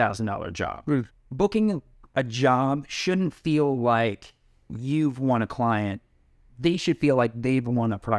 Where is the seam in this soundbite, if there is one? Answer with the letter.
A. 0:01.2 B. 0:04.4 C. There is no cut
A